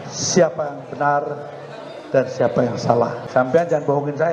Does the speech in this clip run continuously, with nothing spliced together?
yes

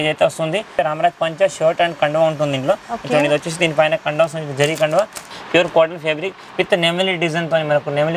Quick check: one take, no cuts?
no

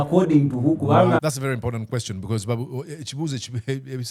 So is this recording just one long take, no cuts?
yes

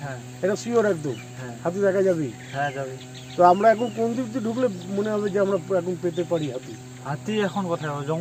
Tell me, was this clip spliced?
no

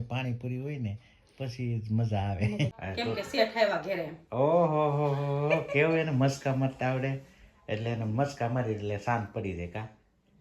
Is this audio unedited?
no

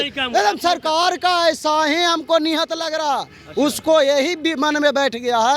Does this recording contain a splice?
no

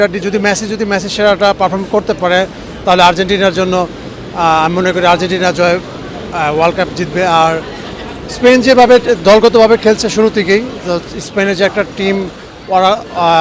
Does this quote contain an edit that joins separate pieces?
no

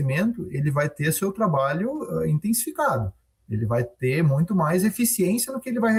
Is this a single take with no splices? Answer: yes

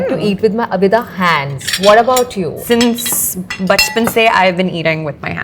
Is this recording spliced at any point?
yes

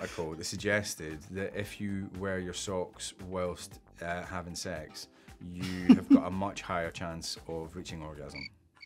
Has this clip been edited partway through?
no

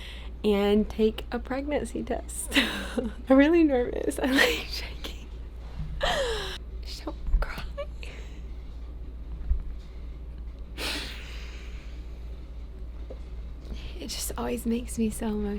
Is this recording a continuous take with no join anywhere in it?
no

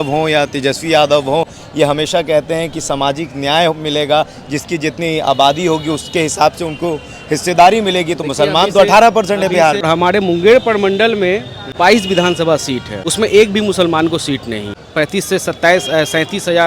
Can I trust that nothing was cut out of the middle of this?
no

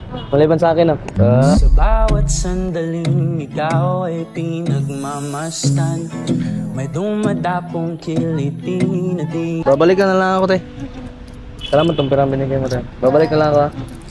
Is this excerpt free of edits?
no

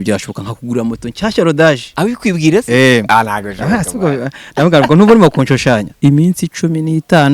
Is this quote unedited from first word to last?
no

